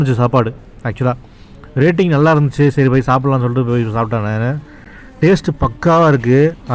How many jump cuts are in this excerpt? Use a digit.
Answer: 0